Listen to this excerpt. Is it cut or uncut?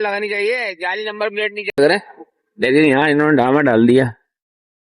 cut